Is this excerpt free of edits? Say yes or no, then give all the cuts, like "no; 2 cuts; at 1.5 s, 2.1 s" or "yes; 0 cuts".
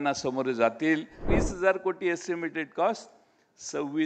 no; 1 cut; at 1.3 s